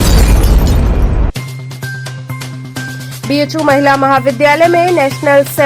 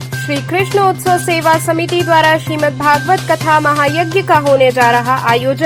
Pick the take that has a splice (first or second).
first